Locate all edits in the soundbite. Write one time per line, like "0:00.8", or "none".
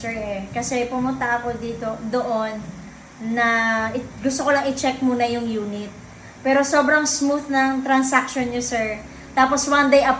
none